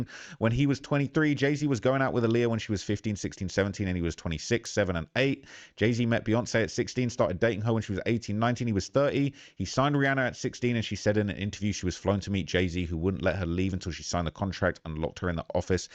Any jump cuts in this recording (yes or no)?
no